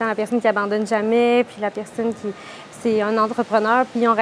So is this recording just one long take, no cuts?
yes; 0 cuts

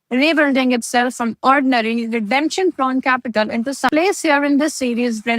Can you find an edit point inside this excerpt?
yes; 1 cut; at 3.9 s

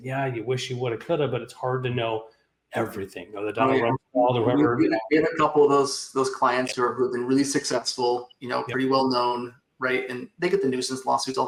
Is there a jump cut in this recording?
no; 0 cuts

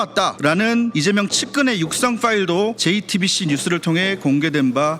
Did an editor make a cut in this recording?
no; 0 cuts

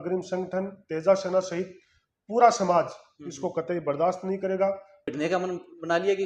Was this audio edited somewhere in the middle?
yes; 1 cut; at 5.1 s

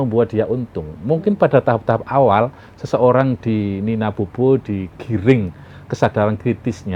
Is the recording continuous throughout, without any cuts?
yes; 0 cuts

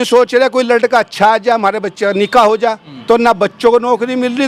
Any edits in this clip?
yes; 1 cut; at 2.9 s

